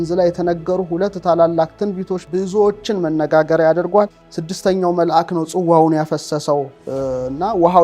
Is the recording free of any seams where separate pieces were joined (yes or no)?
no